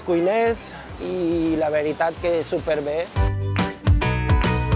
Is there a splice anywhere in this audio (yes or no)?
no